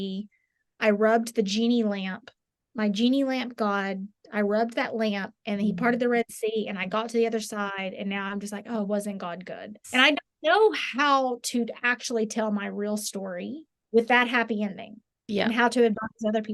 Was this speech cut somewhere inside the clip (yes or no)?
no